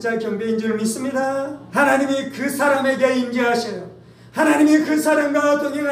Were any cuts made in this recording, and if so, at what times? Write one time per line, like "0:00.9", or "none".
0:01.6